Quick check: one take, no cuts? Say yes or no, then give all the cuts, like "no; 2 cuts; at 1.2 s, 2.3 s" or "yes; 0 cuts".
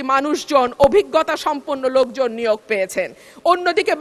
yes; 0 cuts